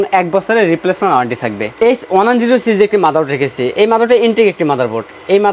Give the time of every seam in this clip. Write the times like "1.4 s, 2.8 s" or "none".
1.6 s